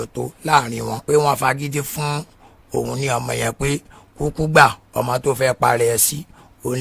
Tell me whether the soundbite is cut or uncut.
cut